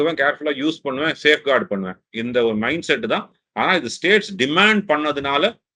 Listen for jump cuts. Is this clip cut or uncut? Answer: uncut